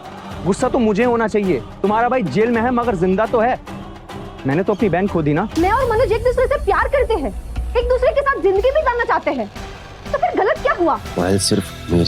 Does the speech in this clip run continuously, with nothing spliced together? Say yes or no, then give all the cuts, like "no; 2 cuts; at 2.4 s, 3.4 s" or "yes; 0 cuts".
no; 2 cuts; at 5.5 s, 11.1 s